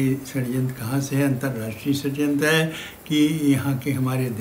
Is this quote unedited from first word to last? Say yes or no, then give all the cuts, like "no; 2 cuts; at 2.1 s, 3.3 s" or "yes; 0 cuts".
yes; 0 cuts